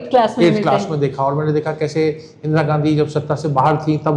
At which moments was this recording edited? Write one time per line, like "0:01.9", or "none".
none